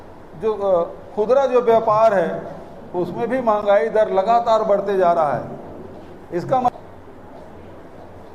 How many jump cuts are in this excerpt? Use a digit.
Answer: 1